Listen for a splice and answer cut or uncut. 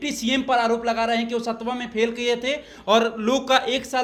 uncut